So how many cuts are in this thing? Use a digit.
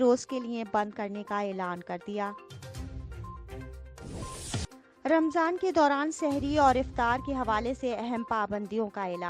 2